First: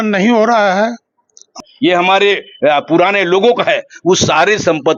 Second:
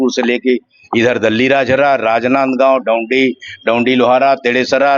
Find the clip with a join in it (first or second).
first